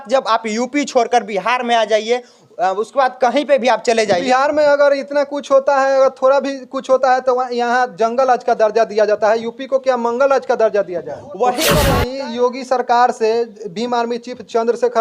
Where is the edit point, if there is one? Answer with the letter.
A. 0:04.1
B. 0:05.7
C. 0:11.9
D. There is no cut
C